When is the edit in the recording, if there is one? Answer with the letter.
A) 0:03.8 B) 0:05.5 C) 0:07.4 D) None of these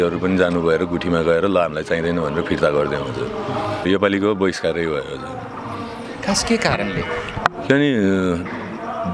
A